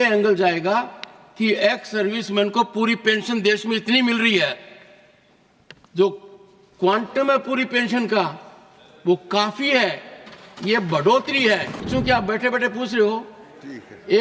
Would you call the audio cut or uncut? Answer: cut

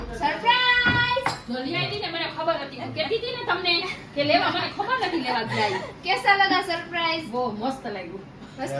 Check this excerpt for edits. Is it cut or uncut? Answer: uncut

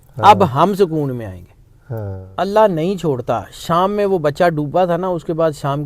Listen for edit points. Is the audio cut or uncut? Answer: cut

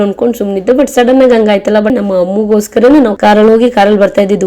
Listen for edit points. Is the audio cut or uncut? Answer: cut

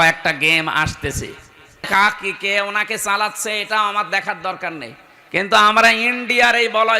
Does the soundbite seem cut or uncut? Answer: cut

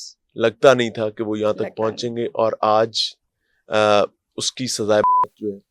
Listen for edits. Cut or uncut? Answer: uncut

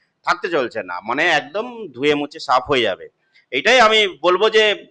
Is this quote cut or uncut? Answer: uncut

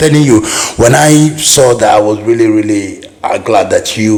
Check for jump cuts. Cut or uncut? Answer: uncut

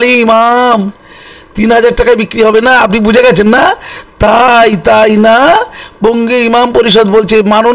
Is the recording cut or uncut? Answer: uncut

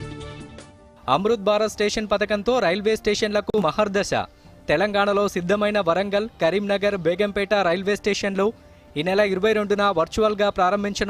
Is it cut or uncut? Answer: cut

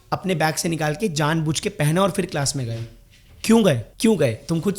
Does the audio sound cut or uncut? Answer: cut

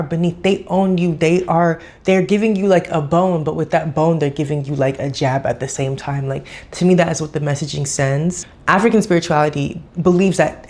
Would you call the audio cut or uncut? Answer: cut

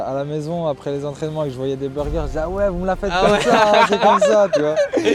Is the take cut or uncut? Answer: uncut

